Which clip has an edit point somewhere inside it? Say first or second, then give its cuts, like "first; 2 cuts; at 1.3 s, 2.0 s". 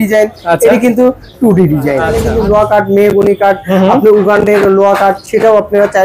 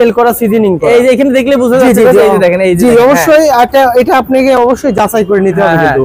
first; 1 cut; at 2.2 s